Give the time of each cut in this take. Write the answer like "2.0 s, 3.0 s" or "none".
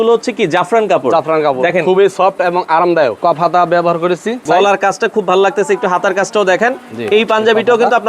3.2 s, 4.4 s